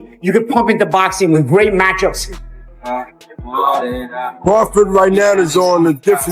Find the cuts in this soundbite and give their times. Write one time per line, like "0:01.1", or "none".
0:02.5